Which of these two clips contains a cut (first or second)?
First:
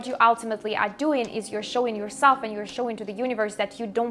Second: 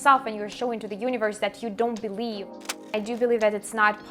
second